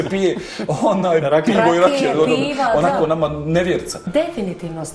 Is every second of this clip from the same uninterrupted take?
no; 1 cut; at 4.0 s

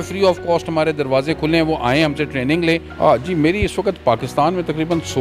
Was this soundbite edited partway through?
yes; 1 cut; at 2.9 s

